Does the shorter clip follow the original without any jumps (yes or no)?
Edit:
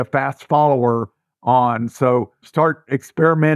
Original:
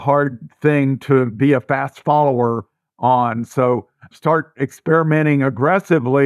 no